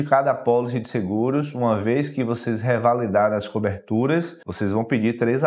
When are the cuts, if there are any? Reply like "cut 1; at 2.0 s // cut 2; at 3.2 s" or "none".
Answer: cut 1; at 4.4 s